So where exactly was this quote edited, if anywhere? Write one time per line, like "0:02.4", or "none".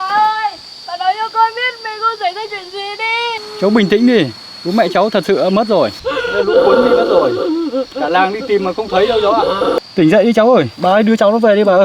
0:03.5
0:06.0
0:09.8
0:10.7